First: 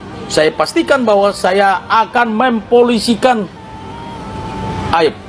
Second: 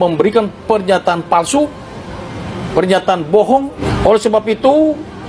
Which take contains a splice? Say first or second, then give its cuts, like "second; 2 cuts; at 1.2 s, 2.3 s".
second; 1 cut; at 3.8 s